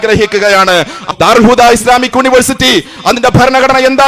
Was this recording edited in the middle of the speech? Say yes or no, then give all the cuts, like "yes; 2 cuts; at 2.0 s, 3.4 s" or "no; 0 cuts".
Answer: yes; 1 cut; at 1.0 s